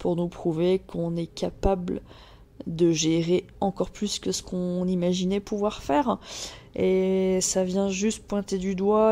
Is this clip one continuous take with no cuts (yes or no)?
yes